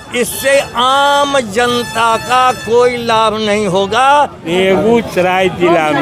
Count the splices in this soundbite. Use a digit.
1